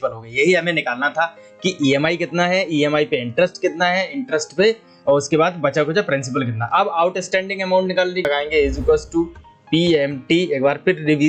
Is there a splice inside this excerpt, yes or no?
yes